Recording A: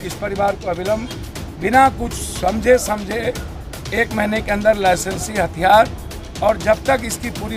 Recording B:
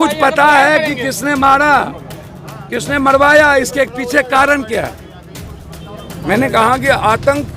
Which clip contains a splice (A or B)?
B